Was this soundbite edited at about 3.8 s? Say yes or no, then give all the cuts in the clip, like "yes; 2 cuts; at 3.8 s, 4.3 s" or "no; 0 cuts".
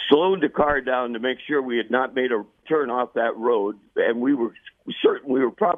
yes; 2 cuts; at 2.6 s, 3.8 s